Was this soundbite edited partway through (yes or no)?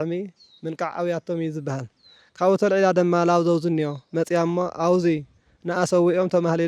no